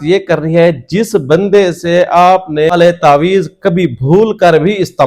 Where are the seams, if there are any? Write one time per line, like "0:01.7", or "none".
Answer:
0:02.7